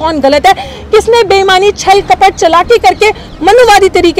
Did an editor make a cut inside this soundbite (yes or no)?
no